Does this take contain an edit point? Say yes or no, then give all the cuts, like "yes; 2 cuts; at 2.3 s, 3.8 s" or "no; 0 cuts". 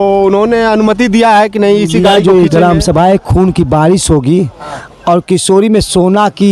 yes; 1 cut; at 2.0 s